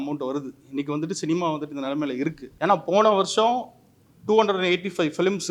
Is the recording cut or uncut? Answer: cut